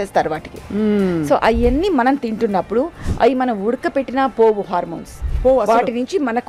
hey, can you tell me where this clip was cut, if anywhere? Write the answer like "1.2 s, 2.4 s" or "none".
none